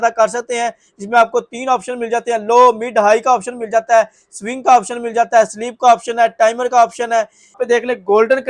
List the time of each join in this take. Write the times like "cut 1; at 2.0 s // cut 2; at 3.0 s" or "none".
cut 1; at 7.6 s